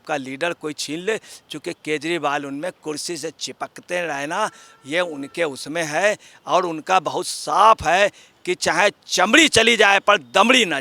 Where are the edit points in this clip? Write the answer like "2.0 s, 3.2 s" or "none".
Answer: none